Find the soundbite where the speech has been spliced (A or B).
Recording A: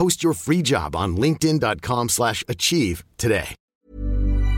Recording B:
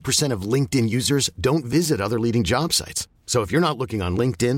A